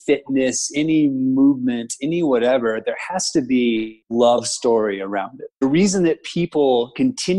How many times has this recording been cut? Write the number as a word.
two